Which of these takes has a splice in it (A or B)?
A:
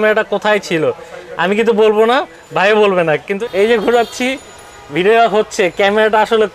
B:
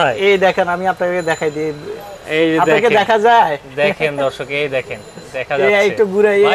A